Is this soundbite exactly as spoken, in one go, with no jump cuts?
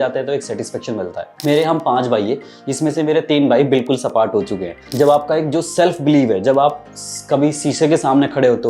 no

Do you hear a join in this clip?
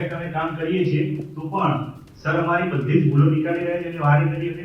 no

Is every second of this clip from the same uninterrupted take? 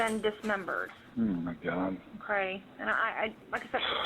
no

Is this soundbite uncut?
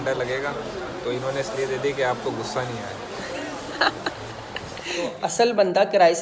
no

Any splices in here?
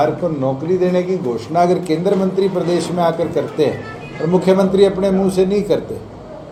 no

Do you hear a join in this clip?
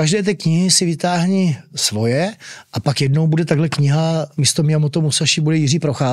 yes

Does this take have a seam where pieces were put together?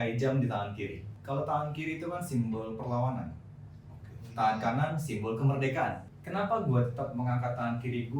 yes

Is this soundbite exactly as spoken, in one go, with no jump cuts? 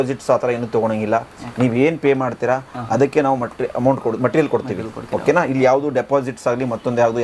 yes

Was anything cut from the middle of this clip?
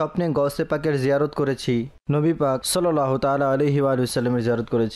no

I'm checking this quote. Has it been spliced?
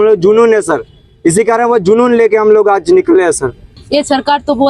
yes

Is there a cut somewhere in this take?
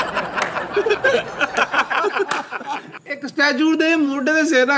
no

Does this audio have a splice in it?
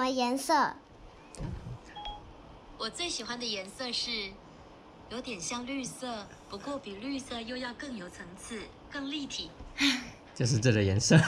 no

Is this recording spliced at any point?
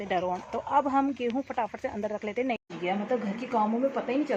yes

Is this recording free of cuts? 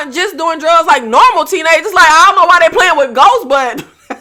yes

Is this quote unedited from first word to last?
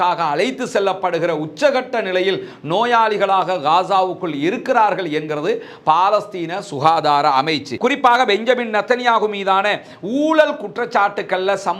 no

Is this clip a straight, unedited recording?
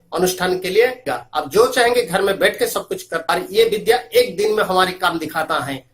no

